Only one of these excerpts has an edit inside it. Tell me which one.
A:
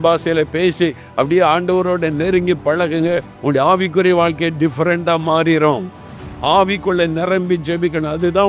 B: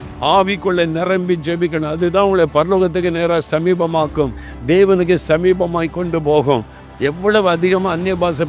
B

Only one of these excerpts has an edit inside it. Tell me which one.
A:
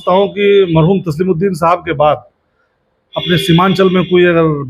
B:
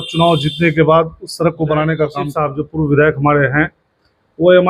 B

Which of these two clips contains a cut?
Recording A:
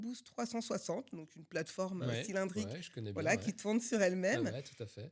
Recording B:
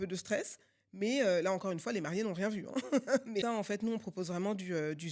B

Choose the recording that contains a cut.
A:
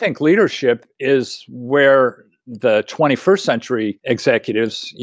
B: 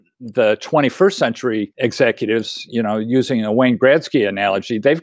A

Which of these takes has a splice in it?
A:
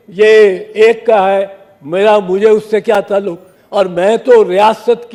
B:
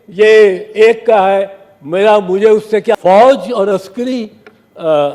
B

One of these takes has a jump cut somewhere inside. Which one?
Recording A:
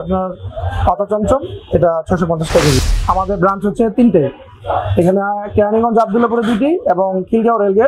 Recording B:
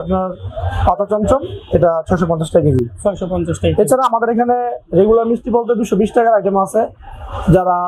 A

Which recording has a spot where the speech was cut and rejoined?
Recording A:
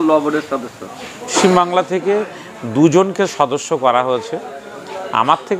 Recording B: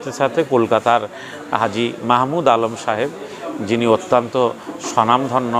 A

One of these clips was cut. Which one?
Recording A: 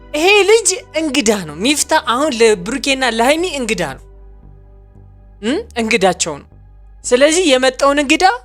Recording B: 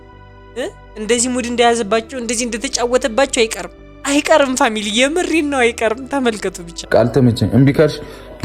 B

